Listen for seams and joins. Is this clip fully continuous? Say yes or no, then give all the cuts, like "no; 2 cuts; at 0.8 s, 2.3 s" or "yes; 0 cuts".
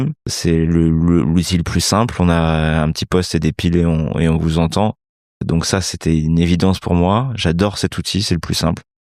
yes; 0 cuts